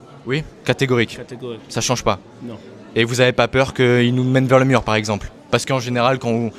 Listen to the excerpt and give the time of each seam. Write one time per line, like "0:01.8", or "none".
none

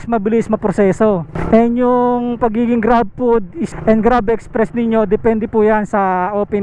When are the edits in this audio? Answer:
none

